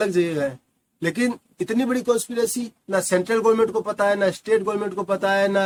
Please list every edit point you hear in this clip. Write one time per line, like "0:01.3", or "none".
none